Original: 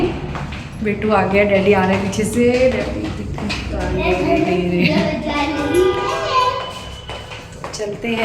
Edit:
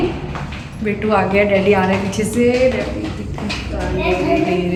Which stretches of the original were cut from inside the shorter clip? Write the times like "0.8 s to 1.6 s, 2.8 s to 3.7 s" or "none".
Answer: none